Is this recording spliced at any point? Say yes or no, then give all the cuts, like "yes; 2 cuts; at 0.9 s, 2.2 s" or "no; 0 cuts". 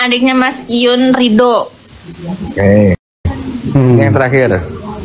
no; 0 cuts